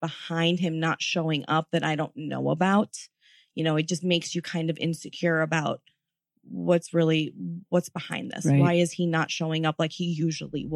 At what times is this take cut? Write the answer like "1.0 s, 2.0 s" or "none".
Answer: none